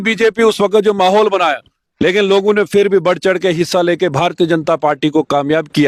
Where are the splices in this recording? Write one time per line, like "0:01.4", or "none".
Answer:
none

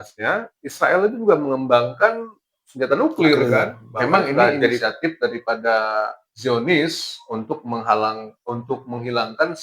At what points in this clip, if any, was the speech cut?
0:04.8

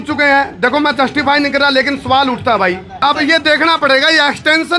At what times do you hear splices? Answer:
0:02.9

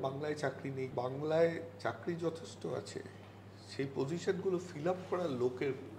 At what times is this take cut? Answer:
0:00.9

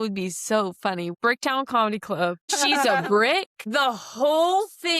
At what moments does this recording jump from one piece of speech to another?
0:01.1
0:02.5
0:03.6

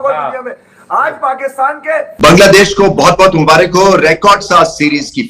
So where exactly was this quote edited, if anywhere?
0:02.2

